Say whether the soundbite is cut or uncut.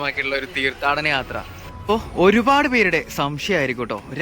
cut